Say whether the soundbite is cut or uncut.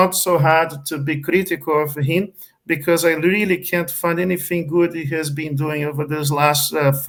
uncut